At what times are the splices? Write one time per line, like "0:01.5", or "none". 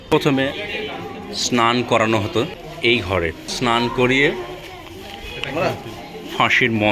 0:02.6
0:03.5